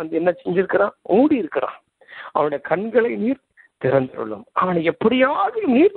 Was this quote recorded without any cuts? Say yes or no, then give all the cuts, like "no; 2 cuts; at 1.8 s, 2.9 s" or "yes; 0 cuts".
yes; 0 cuts